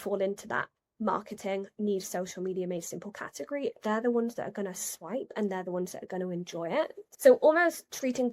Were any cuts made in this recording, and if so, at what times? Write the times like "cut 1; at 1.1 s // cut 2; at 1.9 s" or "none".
cut 1; at 7.0 s

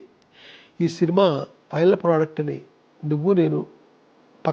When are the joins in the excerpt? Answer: none

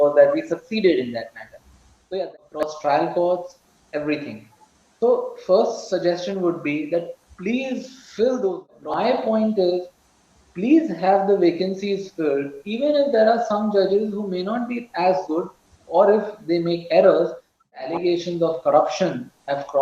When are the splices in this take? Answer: cut 1; at 2.1 s // cut 2; at 8.6 s // cut 3; at 17.7 s

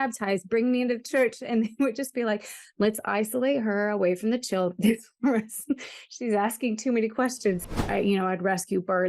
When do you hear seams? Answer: cut 1; at 7.9 s

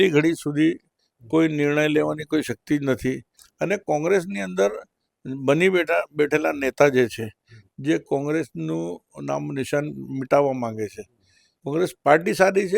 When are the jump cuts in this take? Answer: cut 1; at 3.5 s // cut 2; at 11.6 s

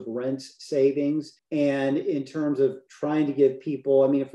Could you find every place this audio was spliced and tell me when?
cut 1; at 1.4 s

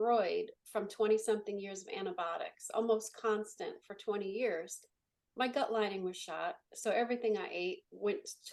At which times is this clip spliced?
none

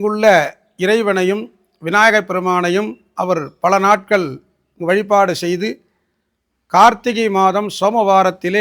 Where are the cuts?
none

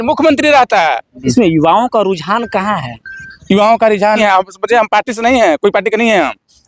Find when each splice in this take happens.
cut 1; at 1.3 s // cut 2; at 4.2 s

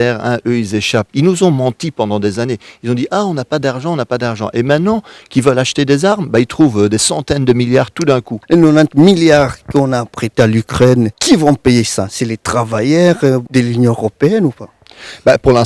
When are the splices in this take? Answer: cut 1; at 1.1 s // cut 2; at 8.4 s

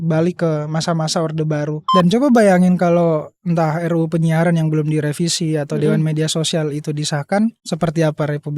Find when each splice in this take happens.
cut 1; at 1.9 s // cut 2; at 7.6 s

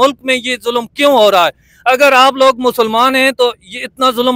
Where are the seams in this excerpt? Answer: none

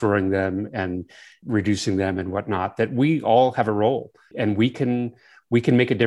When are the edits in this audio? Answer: cut 1; at 1.4 s // cut 2; at 4.3 s

